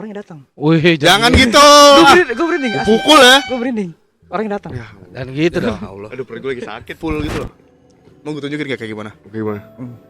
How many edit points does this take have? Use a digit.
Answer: 1